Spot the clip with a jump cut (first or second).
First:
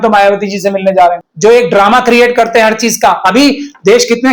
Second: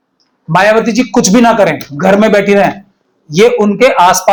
first